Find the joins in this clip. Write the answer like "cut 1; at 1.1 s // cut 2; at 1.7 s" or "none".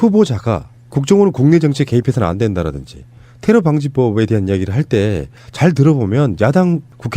cut 1; at 1.7 s